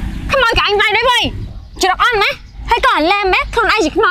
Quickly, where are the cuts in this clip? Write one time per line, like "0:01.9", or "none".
none